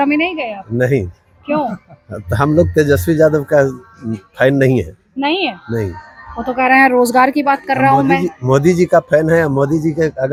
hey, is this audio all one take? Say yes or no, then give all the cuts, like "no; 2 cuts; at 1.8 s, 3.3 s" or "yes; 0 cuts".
yes; 0 cuts